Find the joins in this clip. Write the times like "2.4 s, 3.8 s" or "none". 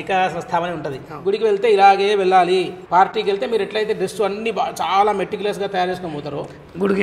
1.0 s, 2.8 s